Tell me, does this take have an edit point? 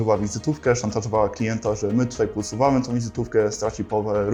no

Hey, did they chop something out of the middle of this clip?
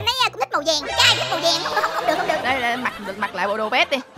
no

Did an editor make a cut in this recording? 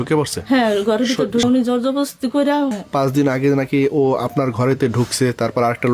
yes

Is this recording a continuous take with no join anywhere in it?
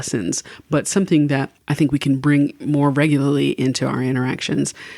no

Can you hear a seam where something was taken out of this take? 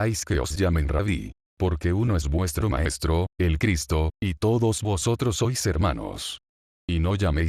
yes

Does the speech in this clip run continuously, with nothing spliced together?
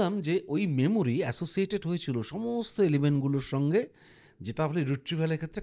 yes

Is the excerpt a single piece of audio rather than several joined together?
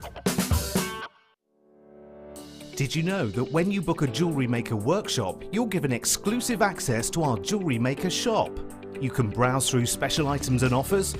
no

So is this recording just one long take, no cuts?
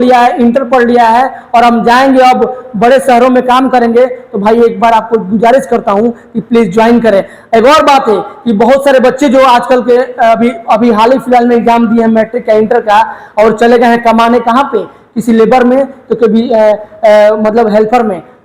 yes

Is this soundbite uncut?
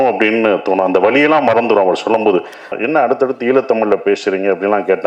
no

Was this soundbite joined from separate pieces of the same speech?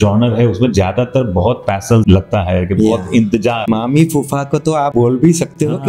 yes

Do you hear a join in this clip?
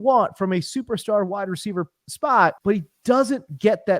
yes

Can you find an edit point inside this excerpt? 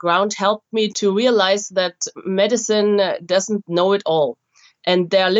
yes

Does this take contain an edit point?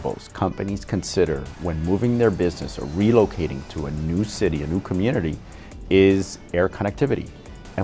no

